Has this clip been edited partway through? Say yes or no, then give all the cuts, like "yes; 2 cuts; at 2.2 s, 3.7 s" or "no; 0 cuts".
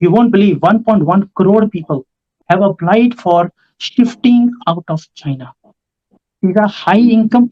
yes; 2 cuts; at 2.3 s, 6.1 s